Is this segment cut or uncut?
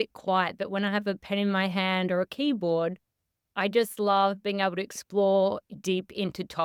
uncut